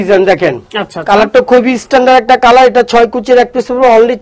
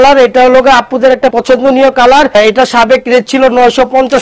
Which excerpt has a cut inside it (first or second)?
second